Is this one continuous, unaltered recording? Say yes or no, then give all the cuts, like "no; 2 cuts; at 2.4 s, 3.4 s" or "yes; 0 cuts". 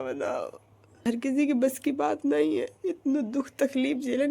no; 1 cut; at 1.1 s